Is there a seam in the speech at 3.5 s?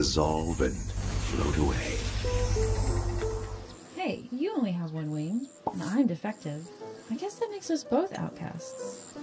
yes; 1 cut; at 3.5 s

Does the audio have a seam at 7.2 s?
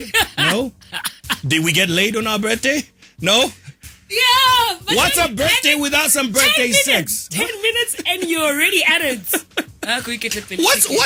no; 0 cuts

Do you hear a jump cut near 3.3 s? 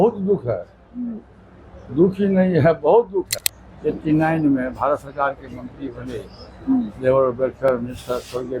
yes; 1 cut; at 3.3 s

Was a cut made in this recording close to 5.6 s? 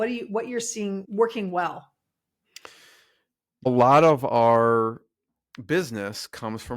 no; 2 cuts; at 1.0 s, 3.7 s

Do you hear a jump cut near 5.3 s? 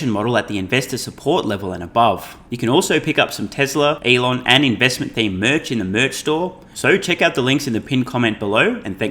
no; 3 cuts; at 2.4 s, 4.0 s, 6.7 s

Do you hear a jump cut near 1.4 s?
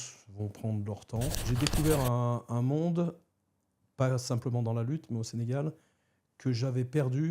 yes; 1 cut; at 1.4 s

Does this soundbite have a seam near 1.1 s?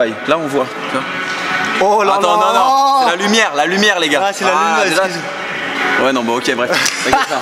no; 0 cuts

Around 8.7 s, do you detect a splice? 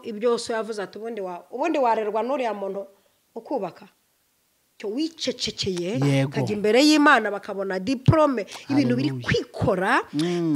no; 1 cut; at 4.8 s

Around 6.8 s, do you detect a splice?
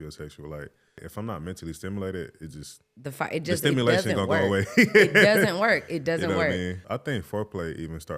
yes; 2 cuts; at 1.0 s, 6.8 s

